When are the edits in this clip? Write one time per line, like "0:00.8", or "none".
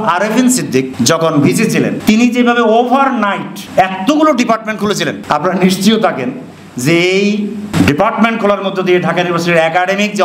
0:00.9
0:02.0
0:03.5
0:05.2
0:07.7